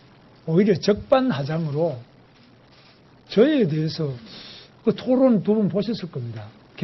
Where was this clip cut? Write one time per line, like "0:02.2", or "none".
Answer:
none